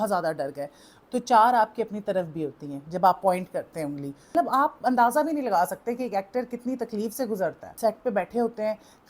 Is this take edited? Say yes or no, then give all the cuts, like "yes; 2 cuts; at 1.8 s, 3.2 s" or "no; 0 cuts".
yes; 3 cuts; at 0.9 s, 4.3 s, 7.6 s